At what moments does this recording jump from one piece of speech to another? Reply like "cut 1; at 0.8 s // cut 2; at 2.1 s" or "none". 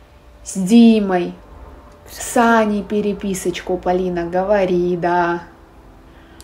none